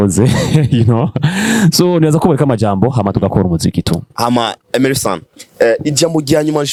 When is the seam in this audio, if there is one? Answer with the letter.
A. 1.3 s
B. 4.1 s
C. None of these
C